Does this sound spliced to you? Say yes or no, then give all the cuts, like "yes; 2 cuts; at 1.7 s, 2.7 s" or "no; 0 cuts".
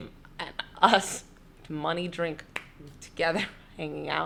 no; 0 cuts